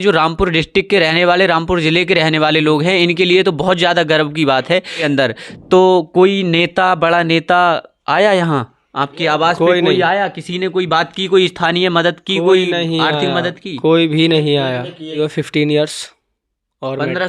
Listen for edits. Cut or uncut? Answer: cut